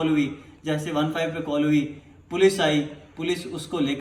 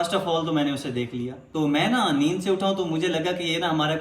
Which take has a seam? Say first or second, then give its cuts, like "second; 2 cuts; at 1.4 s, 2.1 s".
second; 1 cut; at 1.3 s